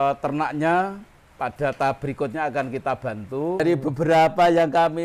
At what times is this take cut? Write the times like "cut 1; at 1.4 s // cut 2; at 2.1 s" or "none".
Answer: cut 1; at 3.6 s

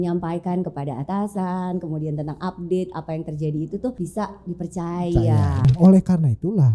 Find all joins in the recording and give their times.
cut 1; at 4.0 s // cut 2; at 5.7 s

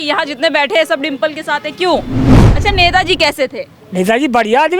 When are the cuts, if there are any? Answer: cut 1; at 2.4 s

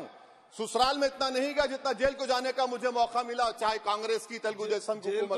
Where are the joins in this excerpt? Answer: none

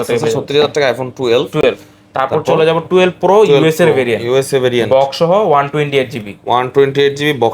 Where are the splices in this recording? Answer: none

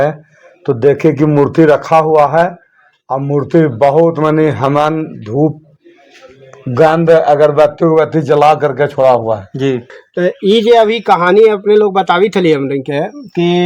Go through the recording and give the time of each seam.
cut 1; at 10.0 s

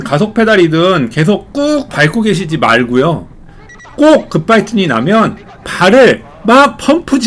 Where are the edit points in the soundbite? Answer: none

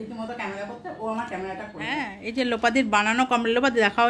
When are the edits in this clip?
cut 1; at 1.8 s

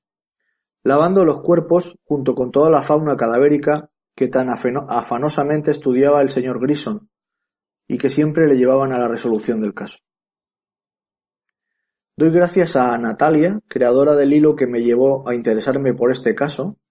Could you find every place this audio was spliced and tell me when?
none

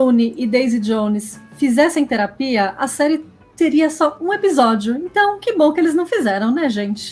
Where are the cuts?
none

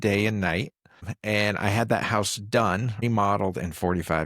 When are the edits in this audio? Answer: cut 1; at 1.1 s // cut 2; at 3.0 s

